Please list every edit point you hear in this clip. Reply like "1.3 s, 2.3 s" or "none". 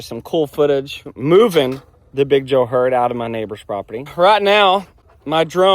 1.1 s, 4.1 s